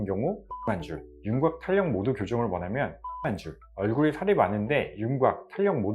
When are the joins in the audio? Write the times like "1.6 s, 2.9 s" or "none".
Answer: 1.0 s, 3.6 s